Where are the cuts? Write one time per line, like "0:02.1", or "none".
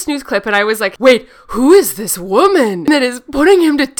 0:00.9
0:02.9